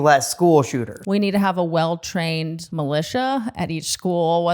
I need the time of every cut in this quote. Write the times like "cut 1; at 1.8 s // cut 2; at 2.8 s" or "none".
cut 1; at 0.9 s // cut 2; at 2.6 s